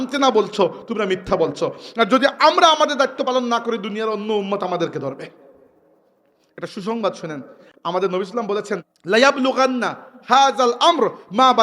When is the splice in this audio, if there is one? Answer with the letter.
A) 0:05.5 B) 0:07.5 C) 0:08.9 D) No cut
C